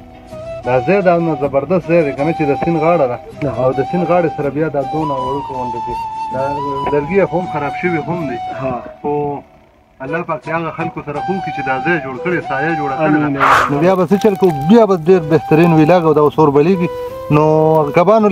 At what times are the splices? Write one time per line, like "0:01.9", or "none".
0:13.5